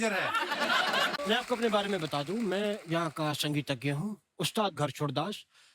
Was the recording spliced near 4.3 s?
no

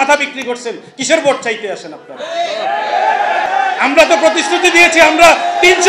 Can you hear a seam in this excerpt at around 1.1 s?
no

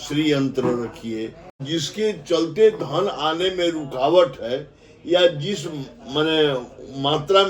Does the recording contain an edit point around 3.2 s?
no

